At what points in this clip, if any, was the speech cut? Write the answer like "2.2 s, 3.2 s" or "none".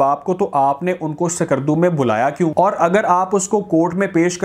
2.5 s

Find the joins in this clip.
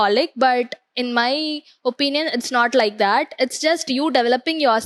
none

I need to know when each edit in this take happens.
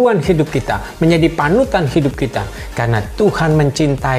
2.6 s

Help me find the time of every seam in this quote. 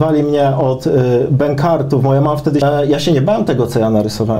2.6 s

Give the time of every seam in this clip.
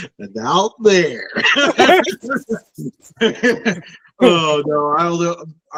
none

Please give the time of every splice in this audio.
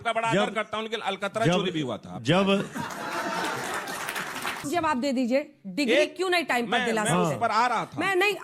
2.2 s, 4.7 s

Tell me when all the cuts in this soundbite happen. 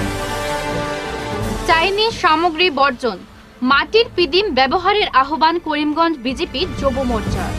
1.1 s

